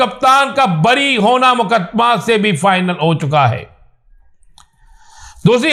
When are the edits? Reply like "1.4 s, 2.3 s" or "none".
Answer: none